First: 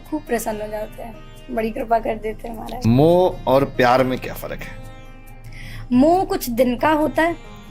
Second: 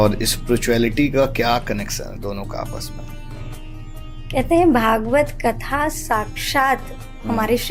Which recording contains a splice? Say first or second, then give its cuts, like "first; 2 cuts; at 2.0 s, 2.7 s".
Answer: first; 1 cut; at 2.8 s